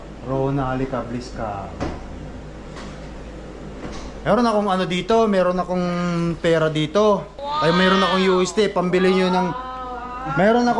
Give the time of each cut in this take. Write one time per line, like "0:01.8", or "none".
0:07.4